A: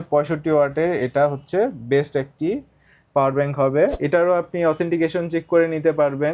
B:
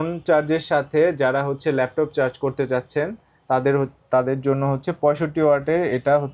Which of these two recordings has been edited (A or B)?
A